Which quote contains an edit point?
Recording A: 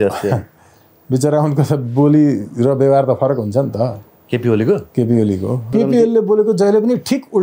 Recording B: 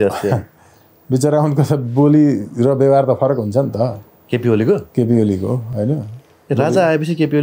A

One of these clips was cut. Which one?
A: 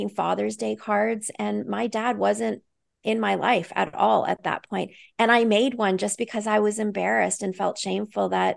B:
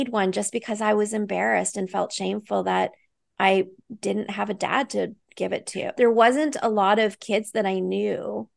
B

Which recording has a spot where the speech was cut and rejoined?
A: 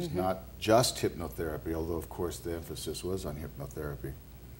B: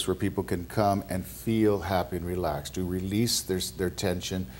A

